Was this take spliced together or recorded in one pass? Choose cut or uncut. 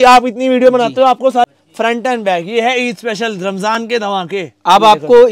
cut